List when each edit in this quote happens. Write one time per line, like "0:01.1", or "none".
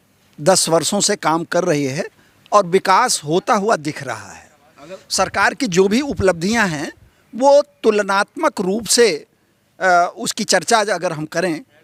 none